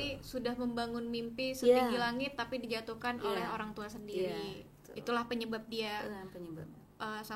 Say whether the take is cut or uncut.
uncut